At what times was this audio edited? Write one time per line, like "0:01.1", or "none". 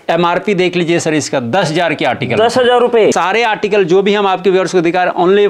0:03.1